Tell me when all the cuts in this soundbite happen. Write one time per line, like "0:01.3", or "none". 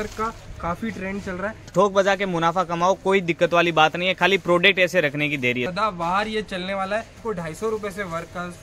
0:01.7
0:05.7
0:07.2